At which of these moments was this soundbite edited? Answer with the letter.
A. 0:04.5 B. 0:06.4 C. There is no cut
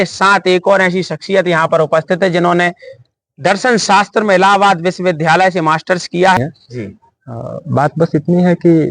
B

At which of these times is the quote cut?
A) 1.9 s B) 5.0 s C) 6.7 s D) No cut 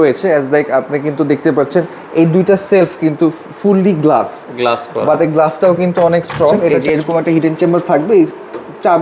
C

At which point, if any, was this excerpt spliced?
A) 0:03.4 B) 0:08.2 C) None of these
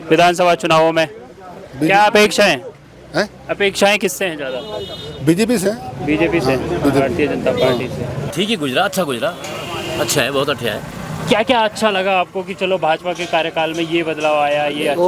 B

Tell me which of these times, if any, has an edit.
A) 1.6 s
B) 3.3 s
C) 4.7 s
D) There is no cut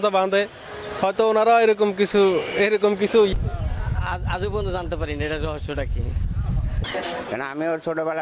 B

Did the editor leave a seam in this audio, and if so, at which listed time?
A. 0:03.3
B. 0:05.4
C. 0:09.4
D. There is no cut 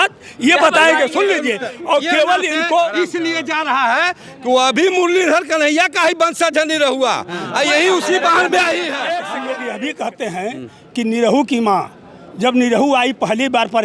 C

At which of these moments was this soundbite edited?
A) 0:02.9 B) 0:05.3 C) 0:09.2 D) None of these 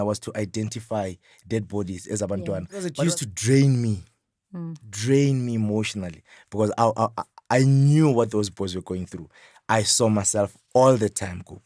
A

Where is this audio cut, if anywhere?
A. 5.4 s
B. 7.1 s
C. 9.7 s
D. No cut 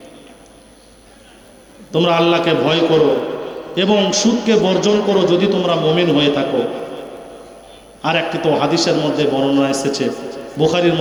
D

